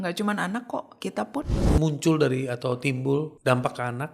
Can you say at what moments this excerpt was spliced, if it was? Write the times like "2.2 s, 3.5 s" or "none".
1.6 s, 3.3 s